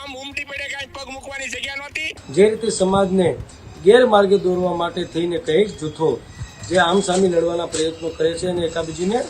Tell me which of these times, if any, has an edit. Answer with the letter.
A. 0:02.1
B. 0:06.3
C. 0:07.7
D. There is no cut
A